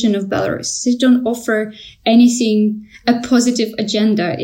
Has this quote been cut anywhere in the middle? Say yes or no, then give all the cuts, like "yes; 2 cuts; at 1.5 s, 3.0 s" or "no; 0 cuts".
no; 0 cuts